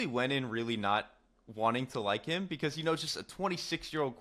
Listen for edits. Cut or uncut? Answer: uncut